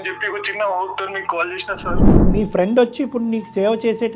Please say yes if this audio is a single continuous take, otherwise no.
no